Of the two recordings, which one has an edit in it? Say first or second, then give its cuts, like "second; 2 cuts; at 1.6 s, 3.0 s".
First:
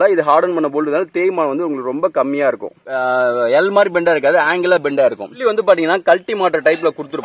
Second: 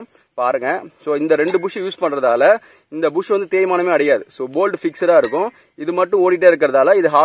first; 1 cut; at 2.7 s